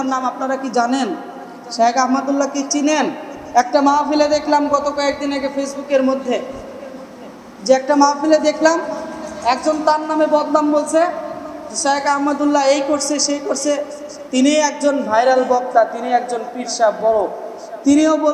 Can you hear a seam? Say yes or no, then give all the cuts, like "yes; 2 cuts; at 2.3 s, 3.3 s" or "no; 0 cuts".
yes; 1 cut; at 3.3 s